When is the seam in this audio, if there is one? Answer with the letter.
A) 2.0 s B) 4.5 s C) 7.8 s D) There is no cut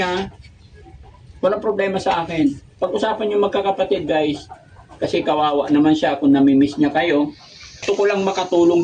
C